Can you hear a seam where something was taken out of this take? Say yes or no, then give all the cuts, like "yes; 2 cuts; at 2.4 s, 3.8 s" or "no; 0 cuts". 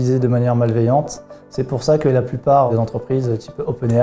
yes; 1 cut; at 2.7 s